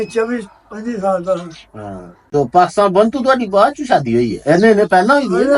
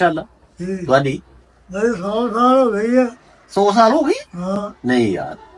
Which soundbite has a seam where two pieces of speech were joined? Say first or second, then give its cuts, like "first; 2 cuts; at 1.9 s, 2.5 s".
first; 1 cut; at 2.2 s